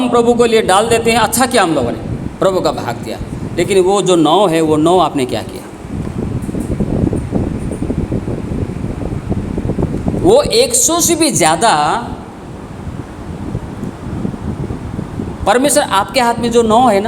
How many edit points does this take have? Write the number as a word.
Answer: zero